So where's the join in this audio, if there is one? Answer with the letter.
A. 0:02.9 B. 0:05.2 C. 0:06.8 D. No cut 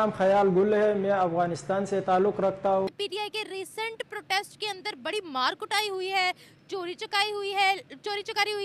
A